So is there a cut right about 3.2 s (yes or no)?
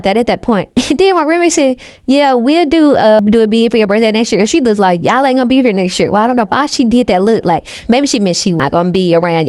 yes